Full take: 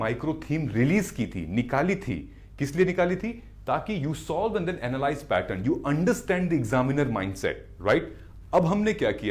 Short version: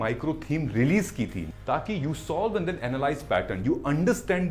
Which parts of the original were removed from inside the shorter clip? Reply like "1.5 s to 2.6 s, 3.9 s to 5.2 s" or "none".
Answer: 1.4 s to 3.4 s